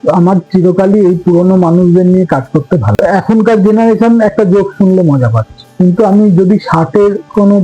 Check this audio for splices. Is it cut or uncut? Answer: cut